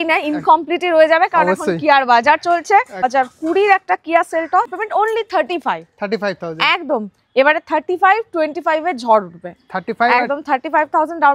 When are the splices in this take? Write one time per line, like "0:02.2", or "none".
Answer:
0:03.1
0:04.7